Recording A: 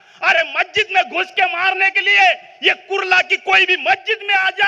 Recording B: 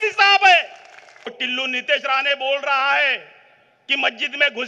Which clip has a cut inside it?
B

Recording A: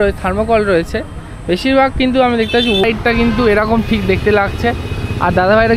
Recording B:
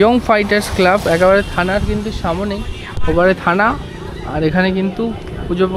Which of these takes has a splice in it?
A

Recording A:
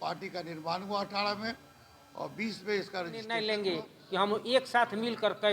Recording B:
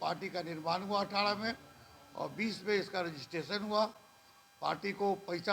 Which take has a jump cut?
A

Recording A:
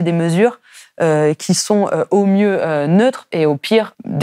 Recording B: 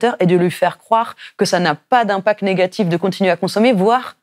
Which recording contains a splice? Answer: A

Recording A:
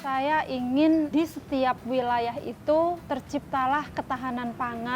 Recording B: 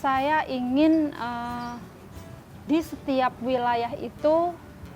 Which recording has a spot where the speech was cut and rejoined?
A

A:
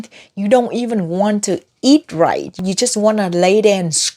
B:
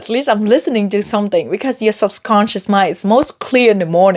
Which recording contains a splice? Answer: A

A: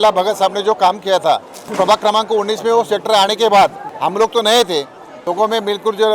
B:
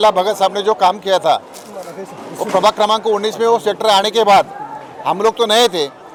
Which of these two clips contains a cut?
A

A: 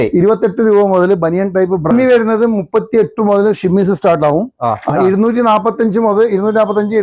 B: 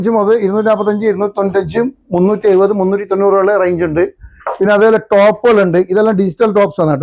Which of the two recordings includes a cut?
A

